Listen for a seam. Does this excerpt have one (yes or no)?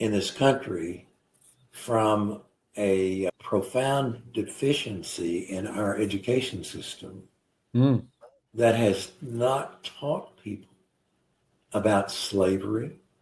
yes